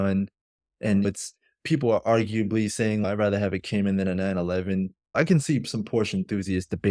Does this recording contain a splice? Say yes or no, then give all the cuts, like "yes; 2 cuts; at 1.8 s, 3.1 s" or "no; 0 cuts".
yes; 2 cuts; at 1.1 s, 5.1 s